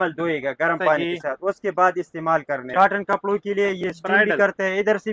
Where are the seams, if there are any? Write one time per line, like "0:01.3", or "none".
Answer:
0:02.7